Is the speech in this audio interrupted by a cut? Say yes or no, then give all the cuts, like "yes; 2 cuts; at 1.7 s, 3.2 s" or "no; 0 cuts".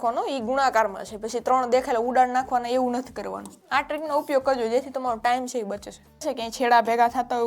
yes; 2 cuts; at 3.5 s, 6.3 s